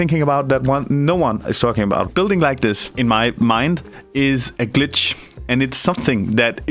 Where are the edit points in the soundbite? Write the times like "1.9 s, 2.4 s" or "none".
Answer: 2.1 s, 2.9 s, 4.0 s